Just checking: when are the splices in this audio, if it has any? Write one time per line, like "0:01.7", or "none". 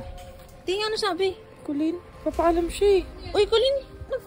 0:02.1
0:03.2

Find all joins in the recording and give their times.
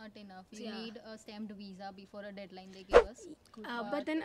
none

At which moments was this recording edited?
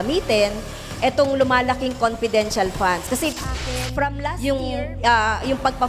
0:03.8

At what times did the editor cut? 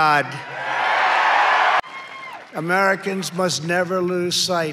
0:01.8

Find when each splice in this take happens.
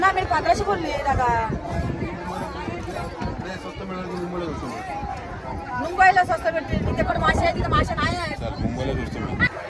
none

